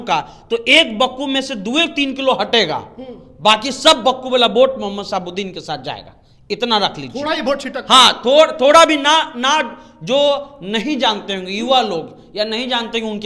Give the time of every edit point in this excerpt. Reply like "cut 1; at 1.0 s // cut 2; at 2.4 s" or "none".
none